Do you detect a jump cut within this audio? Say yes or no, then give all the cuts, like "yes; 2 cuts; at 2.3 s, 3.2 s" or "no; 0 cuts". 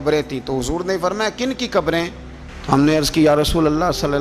no; 0 cuts